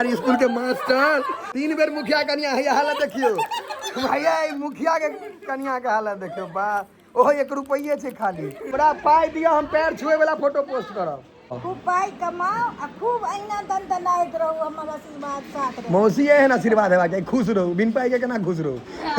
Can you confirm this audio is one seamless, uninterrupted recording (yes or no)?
no